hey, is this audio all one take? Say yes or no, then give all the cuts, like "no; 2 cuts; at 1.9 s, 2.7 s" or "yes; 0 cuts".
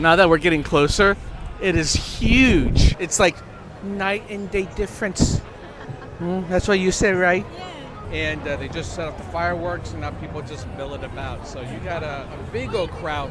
no; 3 cuts; at 3.0 s, 7.9 s, 12.3 s